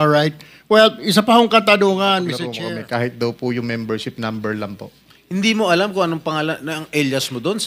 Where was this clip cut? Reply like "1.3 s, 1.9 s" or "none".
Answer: 2.5 s